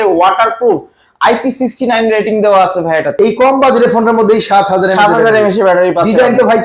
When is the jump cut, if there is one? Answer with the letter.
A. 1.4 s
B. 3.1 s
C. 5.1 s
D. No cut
B